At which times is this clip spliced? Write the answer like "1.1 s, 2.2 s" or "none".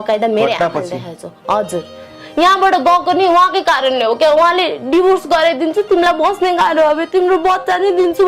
2.2 s